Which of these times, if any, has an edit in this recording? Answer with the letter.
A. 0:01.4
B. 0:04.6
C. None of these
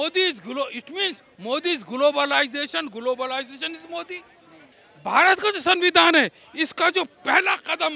B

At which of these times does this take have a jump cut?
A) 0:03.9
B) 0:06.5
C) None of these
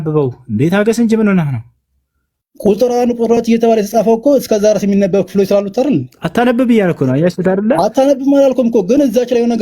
C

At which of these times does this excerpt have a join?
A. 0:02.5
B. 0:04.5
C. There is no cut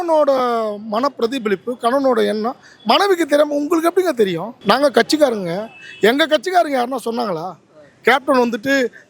B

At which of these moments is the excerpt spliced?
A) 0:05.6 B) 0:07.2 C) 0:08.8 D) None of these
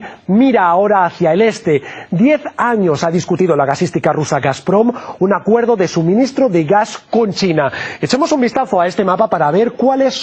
D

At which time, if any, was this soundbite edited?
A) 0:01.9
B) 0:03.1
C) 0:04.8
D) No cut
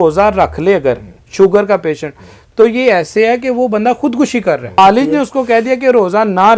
C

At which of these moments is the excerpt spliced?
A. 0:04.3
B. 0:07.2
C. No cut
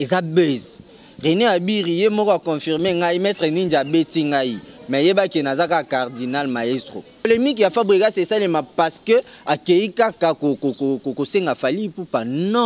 B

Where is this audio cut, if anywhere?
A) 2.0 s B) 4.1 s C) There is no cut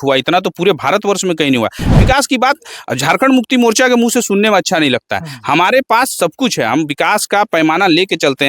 A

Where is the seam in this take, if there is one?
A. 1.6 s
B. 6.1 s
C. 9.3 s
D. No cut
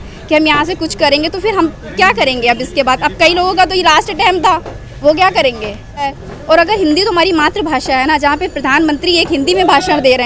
B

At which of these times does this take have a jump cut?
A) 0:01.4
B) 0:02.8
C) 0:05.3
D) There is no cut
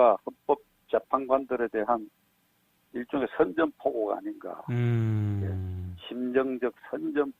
D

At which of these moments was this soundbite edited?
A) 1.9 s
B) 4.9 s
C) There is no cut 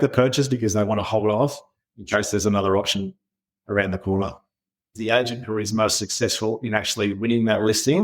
B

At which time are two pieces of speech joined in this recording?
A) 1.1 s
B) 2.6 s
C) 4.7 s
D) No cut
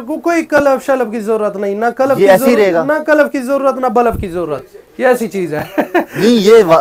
D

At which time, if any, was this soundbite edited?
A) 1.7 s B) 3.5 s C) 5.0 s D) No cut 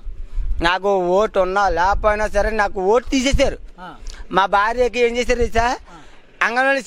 D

